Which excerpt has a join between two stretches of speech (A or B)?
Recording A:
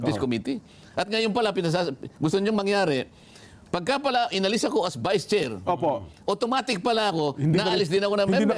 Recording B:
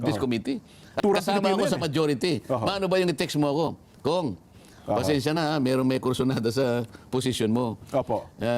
B